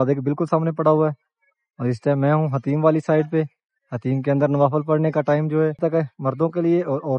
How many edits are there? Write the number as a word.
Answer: one